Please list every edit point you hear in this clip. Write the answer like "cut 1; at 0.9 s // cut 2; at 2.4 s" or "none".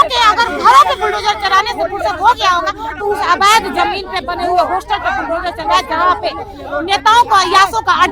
none

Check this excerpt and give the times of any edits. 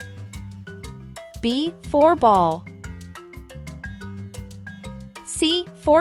none

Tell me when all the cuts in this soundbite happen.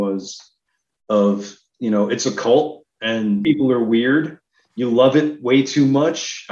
cut 1; at 3.4 s

